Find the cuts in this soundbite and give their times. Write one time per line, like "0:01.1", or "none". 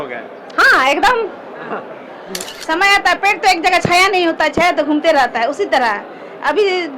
0:02.5